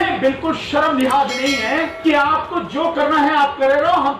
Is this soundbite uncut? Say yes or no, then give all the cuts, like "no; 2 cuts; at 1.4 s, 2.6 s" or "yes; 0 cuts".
no; 1 cut; at 1.9 s